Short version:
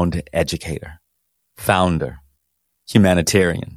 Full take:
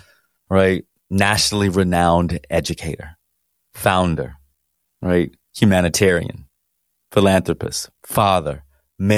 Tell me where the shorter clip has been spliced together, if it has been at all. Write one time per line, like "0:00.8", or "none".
0:02.7